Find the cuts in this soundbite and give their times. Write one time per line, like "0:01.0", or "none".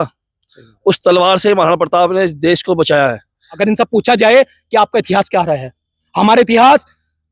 0:03.5